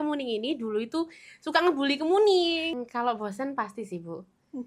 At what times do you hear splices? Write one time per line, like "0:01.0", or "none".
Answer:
0:02.8